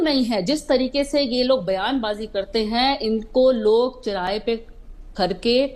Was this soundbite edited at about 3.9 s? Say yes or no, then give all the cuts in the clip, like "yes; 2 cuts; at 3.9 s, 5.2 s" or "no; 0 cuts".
no; 0 cuts